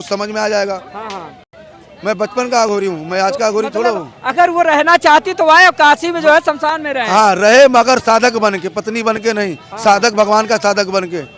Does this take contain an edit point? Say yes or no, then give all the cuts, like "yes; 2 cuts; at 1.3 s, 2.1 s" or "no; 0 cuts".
no; 0 cuts